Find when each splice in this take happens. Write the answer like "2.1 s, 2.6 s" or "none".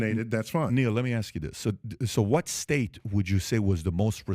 1.8 s

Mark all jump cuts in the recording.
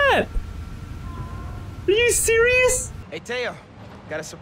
3.0 s

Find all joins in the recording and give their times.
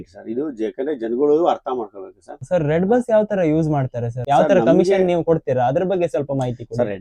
2.4 s, 4.1 s

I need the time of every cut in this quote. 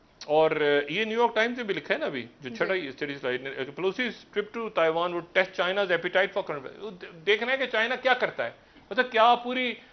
none

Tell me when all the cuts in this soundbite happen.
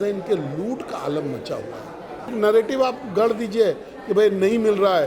2.3 s

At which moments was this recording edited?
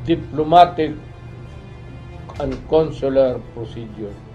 none

